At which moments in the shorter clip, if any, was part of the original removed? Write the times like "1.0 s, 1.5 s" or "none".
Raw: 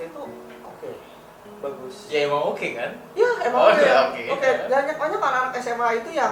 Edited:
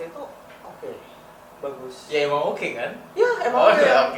none